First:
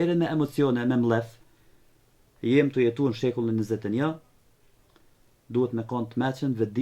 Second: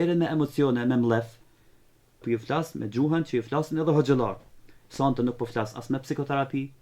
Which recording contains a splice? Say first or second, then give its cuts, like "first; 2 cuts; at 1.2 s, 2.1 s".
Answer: second; 1 cut; at 2.2 s